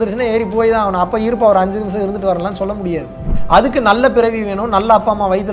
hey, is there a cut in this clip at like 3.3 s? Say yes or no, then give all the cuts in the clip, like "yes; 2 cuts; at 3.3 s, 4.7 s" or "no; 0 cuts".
yes; 1 cut; at 3.3 s